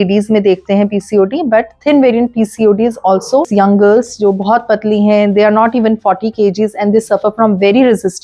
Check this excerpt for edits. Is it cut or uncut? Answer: cut